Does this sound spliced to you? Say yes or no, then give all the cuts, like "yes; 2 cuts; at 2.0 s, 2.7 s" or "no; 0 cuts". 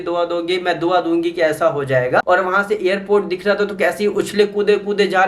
yes; 1 cut; at 2.2 s